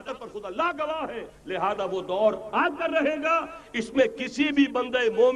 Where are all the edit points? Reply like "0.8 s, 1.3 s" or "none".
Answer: 1.3 s